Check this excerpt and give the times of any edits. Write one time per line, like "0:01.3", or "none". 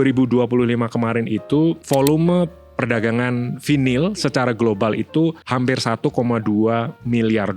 0:01.8
0:05.4